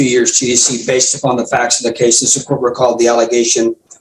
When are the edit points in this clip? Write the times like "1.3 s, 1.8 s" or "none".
none